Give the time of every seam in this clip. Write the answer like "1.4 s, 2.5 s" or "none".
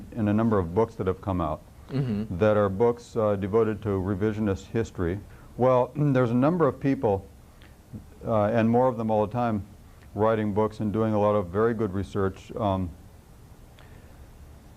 9.4 s